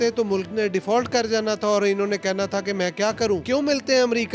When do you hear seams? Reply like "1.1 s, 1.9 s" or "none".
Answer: 3.4 s